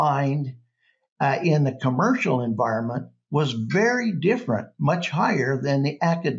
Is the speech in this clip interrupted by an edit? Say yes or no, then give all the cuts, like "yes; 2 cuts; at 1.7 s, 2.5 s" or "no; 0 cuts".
no; 0 cuts